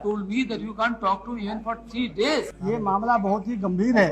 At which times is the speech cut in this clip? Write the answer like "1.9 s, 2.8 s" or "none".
2.5 s